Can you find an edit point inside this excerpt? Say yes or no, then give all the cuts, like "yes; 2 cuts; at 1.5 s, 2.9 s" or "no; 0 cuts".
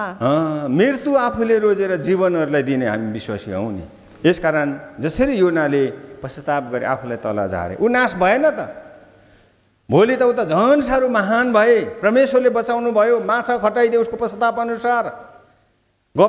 no; 0 cuts